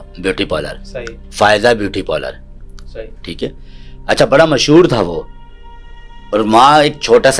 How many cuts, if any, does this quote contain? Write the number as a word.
zero